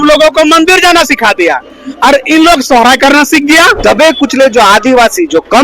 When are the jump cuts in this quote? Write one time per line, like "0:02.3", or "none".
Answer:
0:03.8